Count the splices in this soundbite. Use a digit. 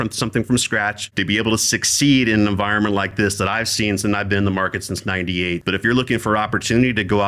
2